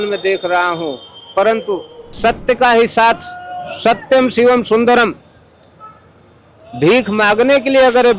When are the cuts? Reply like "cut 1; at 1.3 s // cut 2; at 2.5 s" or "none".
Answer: cut 1; at 2.0 s